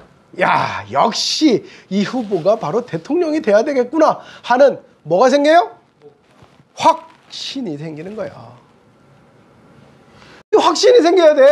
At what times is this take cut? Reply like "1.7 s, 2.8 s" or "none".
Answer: 10.5 s